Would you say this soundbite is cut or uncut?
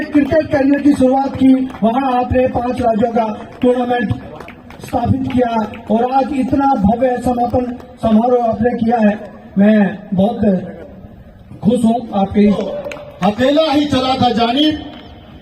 cut